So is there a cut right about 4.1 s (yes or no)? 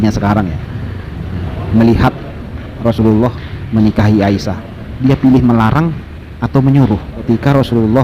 no